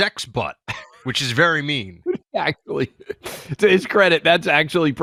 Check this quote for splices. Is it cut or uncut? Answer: uncut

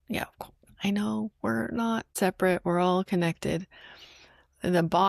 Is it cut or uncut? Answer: cut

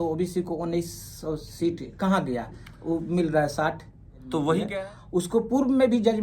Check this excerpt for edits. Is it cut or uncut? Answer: cut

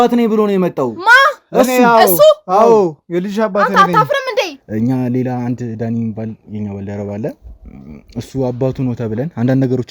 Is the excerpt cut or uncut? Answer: cut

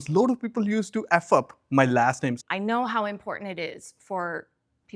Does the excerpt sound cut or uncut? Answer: cut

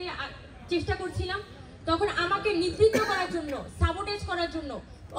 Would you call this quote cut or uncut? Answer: uncut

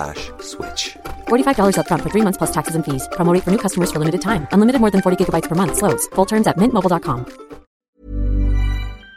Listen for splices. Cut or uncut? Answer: cut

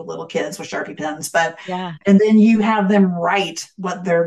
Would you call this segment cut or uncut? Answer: uncut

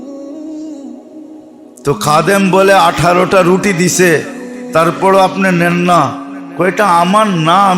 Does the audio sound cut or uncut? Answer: cut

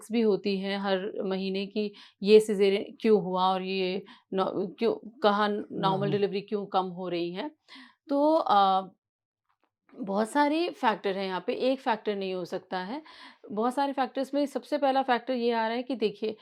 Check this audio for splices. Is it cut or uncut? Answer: uncut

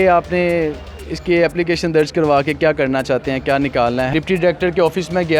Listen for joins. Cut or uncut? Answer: cut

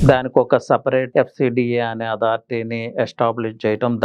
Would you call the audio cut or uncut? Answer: cut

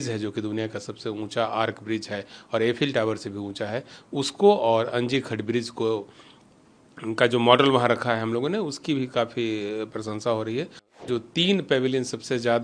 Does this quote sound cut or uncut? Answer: cut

